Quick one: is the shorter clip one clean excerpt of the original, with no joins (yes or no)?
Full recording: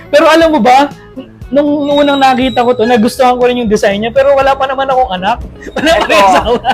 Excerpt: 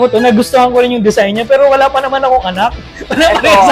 yes